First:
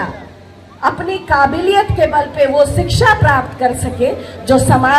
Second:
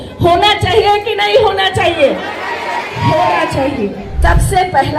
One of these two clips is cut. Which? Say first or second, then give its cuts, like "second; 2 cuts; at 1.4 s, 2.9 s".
second; 1 cut; at 4.1 s